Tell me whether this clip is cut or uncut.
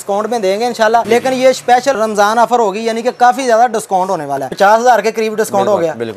cut